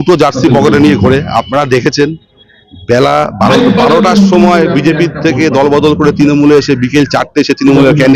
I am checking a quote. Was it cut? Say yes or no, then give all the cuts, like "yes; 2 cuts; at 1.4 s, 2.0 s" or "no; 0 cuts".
no; 0 cuts